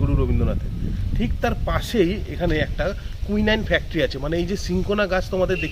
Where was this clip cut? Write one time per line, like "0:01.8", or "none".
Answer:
none